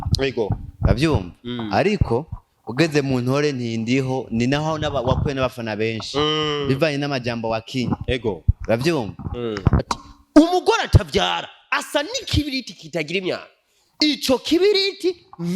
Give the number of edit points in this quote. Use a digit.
1